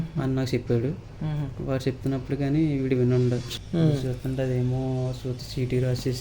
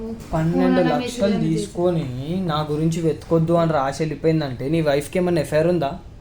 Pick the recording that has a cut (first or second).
first